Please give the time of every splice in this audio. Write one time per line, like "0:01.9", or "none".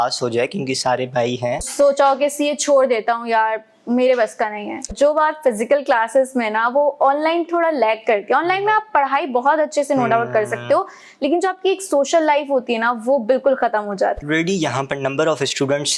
0:01.7
0:04.9
0:14.2